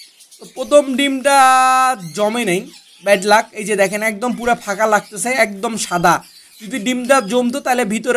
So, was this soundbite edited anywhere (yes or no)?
no